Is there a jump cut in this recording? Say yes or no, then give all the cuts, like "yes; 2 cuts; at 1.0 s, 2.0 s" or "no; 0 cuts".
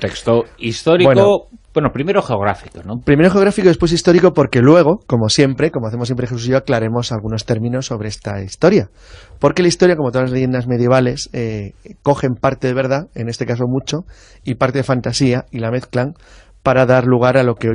yes; 1 cut; at 7.0 s